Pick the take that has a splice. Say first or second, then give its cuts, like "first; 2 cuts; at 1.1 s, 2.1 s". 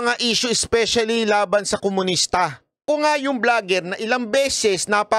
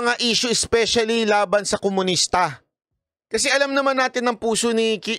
first; 1 cut; at 2.8 s